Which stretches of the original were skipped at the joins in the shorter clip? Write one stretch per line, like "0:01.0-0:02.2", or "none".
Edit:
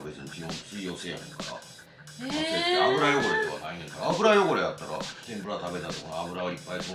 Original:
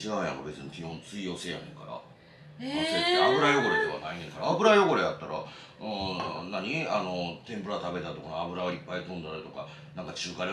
0:05.6-0:07.4